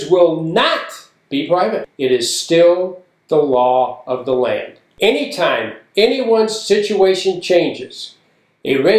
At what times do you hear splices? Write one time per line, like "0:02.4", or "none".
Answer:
0:01.9
0:04.8